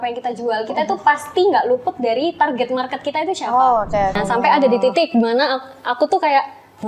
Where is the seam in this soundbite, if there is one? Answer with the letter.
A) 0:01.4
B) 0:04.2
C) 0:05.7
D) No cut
B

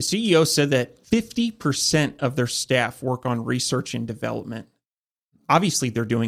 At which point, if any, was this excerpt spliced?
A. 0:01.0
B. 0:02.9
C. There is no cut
A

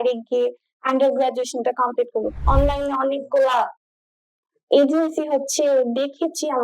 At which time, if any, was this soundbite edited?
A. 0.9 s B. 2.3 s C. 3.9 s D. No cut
B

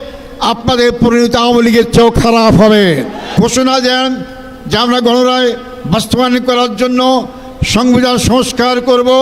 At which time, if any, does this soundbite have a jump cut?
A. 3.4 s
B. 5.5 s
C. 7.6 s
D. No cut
A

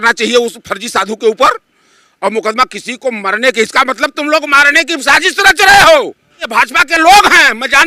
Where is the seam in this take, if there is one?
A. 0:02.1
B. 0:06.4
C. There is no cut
B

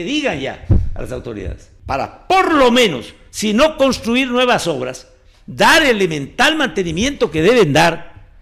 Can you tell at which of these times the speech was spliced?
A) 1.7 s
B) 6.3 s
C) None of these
A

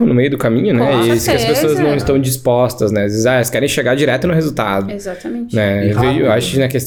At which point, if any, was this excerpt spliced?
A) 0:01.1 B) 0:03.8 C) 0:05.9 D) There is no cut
D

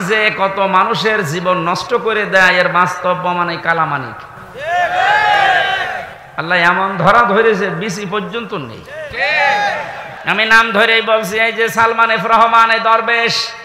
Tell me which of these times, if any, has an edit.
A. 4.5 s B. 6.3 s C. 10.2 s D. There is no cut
C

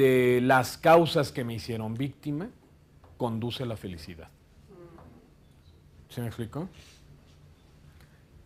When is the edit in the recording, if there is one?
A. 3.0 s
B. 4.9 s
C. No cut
C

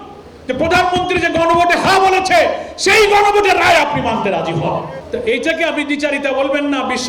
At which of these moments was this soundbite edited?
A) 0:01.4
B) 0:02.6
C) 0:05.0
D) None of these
C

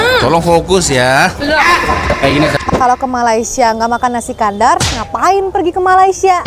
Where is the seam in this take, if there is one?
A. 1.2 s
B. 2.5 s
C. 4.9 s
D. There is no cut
B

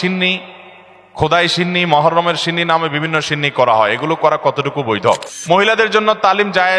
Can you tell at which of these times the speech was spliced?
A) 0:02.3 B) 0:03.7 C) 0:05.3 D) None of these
C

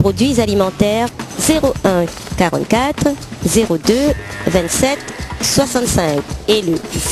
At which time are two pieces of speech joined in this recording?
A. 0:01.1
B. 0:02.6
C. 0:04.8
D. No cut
A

